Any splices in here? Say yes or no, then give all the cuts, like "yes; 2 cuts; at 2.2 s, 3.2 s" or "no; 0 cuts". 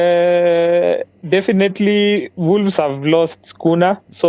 no; 0 cuts